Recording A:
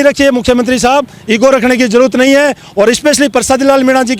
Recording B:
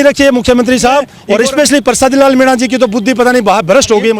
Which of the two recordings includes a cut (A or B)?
B